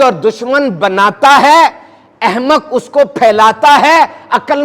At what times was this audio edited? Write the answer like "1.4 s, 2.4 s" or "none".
none